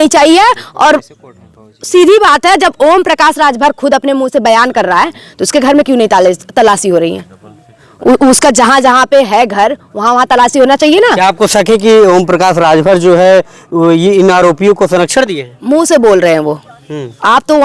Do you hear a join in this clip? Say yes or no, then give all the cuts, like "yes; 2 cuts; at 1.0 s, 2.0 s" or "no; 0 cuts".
no; 0 cuts